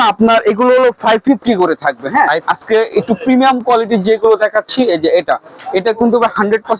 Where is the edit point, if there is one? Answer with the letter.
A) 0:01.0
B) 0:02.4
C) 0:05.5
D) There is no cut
B